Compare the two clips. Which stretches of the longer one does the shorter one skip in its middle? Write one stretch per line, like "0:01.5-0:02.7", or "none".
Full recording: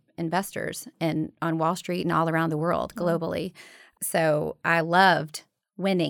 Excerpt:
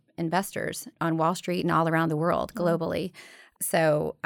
0:00.9-0:01.3